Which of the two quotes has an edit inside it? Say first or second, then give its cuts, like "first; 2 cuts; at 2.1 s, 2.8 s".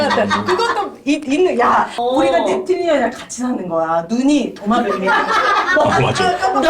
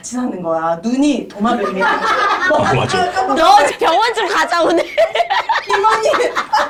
first; 1 cut; at 2.0 s